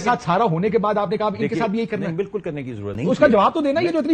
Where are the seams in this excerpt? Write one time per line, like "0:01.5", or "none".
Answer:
0:02.9